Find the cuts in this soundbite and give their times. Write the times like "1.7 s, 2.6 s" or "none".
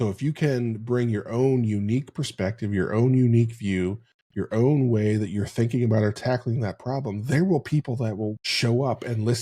8.5 s

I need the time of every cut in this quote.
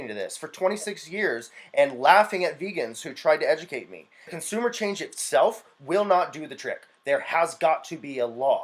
4.3 s

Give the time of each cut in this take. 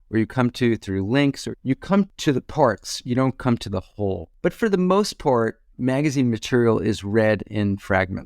2.1 s, 4.3 s

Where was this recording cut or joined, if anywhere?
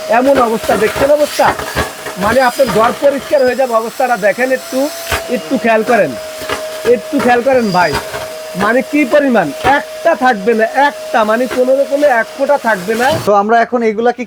13.2 s

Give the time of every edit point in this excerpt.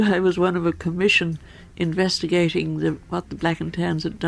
none

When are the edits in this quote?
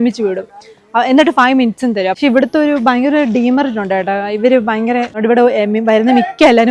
2.2 s, 5.2 s

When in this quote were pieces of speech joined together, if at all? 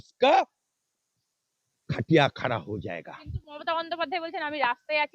none

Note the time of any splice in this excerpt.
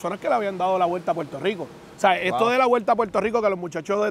none

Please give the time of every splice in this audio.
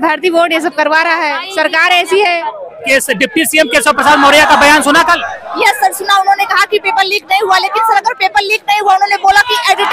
2.8 s

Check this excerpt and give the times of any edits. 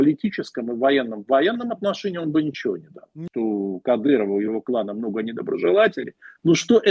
3.2 s

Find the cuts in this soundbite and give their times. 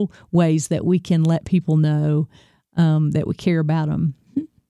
none

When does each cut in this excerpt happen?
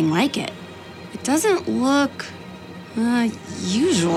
1.1 s, 2.5 s

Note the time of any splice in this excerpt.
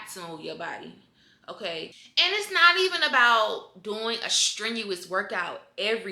2.0 s

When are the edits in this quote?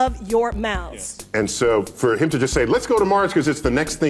1.3 s

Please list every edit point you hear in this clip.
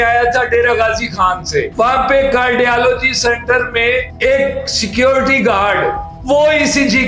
none

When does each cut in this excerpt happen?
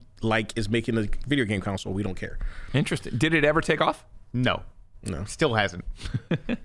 none

